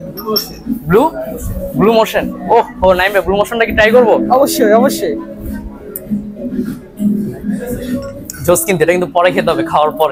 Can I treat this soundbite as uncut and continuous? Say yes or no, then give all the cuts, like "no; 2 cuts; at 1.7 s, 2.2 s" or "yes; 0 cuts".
yes; 0 cuts